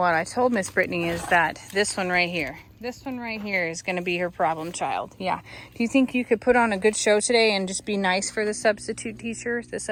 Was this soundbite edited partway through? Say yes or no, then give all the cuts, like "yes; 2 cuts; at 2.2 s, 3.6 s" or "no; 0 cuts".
no; 0 cuts